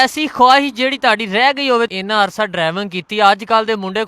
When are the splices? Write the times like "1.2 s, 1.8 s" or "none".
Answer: 2.0 s